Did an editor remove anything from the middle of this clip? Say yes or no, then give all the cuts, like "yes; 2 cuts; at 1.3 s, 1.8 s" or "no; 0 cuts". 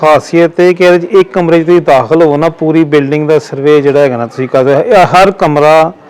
no; 0 cuts